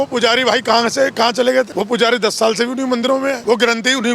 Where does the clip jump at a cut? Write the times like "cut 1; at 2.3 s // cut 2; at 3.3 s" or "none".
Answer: cut 1; at 1.7 s // cut 2; at 3.4 s